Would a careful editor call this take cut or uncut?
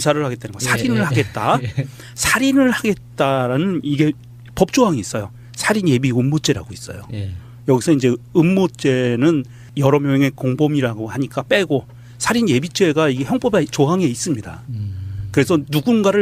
cut